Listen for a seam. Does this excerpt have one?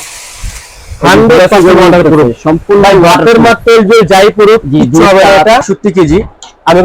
yes; 1 cut; at 5.7 s

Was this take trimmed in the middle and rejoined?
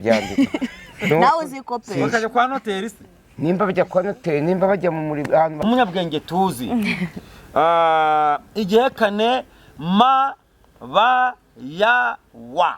yes; 1 cut; at 5.6 s

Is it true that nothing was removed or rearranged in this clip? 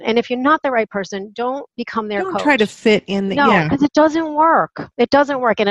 yes; 0 cuts

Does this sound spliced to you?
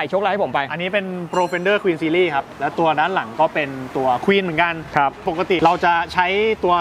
yes; 2 cuts; at 2.5 s, 5.2 s

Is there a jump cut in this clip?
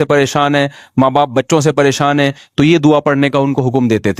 no; 0 cuts

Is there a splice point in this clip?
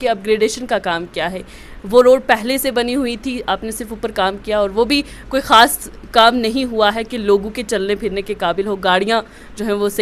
no; 0 cuts

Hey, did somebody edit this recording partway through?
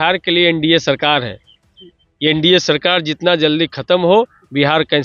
no; 0 cuts

